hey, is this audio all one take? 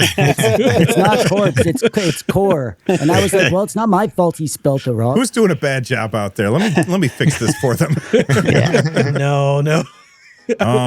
no; 2 cuts; at 5.1 s, 9.2 s

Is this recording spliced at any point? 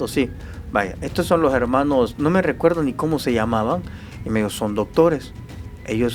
no; 0 cuts

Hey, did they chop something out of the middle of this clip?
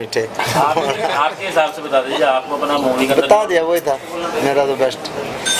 no; 0 cuts

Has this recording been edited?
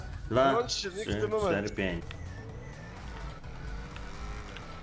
yes; 1 cut; at 2.0 s

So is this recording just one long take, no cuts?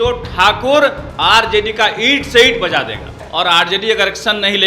no; 1 cut; at 3.2 s

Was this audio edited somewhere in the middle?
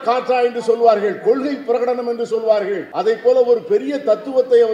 yes; 1 cut; at 2.9 s

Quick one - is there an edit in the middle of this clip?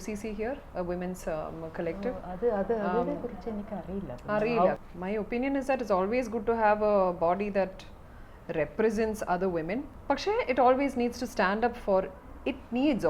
yes; 2 cuts; at 4.8 s, 9.9 s

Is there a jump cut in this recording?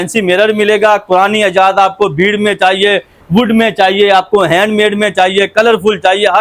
no; 0 cuts

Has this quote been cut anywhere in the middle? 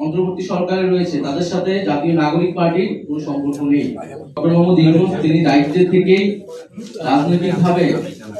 yes; 1 cut; at 4.4 s

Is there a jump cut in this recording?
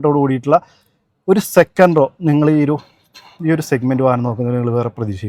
no; 0 cuts

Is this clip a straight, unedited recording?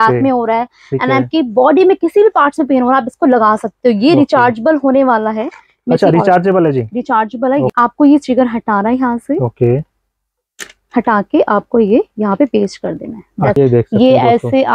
no; 2 cuts; at 7.7 s, 13.5 s

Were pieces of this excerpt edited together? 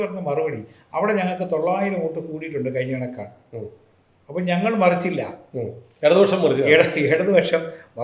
no; 0 cuts

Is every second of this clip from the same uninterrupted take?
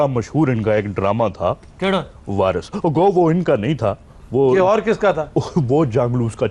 yes; 0 cuts

